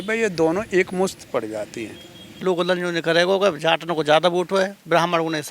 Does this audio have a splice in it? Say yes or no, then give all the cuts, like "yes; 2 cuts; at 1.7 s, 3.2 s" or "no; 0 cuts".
yes; 1 cut; at 2.4 s